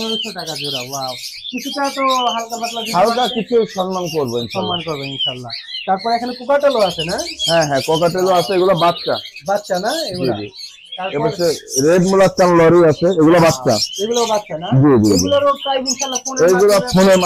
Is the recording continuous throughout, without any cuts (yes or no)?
yes